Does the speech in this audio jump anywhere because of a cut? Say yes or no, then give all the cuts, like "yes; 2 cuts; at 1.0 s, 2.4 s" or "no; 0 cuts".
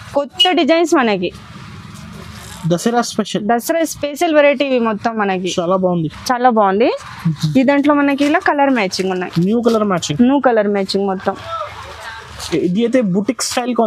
no; 0 cuts